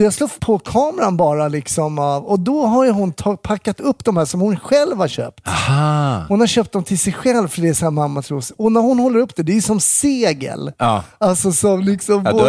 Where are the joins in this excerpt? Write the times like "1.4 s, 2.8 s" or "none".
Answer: none